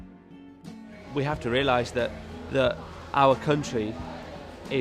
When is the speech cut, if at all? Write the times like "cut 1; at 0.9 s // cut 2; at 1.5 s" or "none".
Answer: cut 1; at 0.9 s